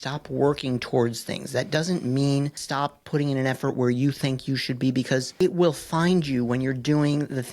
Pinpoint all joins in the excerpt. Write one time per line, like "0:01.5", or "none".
0:02.6
0:05.3

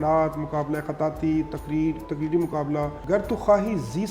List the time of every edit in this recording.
0:03.0

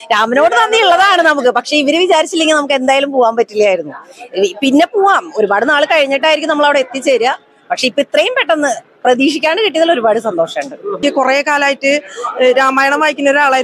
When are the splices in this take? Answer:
0:11.0

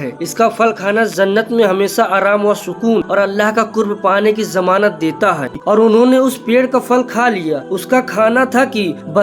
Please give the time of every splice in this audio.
0:05.5

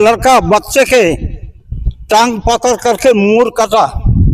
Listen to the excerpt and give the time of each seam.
none

